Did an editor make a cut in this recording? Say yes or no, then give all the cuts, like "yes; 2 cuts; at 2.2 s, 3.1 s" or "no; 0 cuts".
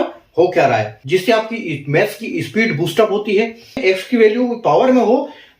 yes; 2 cuts; at 1.0 s, 3.8 s